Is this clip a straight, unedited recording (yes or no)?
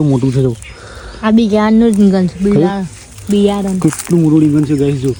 yes